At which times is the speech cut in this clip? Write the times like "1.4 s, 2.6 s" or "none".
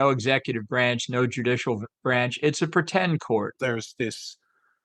3.5 s